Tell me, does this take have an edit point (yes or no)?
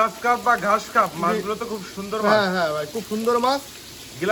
no